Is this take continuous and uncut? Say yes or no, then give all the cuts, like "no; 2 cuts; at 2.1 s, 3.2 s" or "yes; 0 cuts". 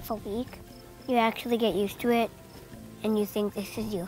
yes; 0 cuts